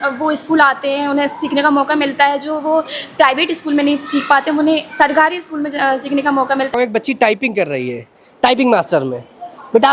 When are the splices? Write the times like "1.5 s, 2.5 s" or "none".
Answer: 6.7 s